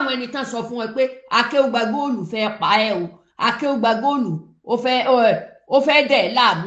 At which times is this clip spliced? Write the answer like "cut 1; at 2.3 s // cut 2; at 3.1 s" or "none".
none